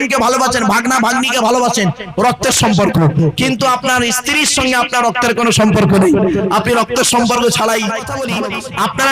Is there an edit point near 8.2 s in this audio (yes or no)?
yes